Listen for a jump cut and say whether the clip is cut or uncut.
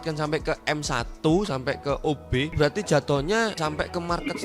cut